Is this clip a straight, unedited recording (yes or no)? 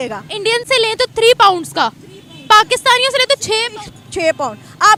yes